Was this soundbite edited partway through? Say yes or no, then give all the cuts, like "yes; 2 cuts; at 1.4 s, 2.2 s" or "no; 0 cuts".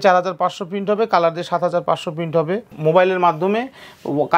yes; 1 cut; at 2.7 s